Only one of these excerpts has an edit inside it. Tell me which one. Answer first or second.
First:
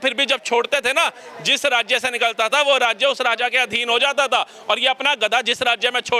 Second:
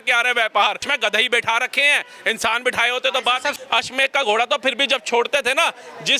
second